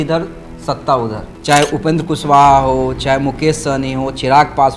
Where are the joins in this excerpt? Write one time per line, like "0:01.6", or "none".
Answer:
0:01.3